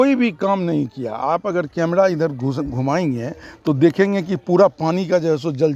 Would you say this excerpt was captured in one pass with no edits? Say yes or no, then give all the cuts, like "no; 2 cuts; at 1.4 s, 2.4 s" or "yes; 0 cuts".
yes; 0 cuts